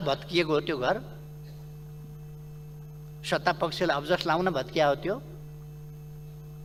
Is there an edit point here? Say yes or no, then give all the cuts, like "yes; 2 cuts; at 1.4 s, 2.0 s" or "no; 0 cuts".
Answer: no; 0 cuts